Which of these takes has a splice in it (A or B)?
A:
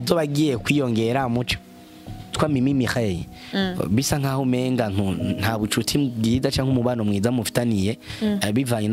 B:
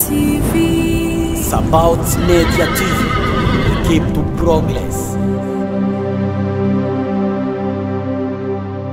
A